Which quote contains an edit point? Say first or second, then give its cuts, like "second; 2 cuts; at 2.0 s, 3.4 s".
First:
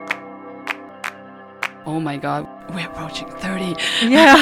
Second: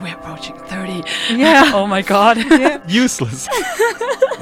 first; 1 cut; at 0.9 s